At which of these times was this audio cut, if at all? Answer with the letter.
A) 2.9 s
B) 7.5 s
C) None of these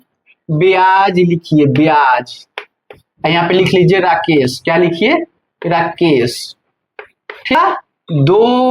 B